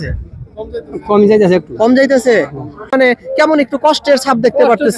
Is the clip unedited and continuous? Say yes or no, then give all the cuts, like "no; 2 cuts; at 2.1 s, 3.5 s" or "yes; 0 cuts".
no; 1 cut; at 2.9 s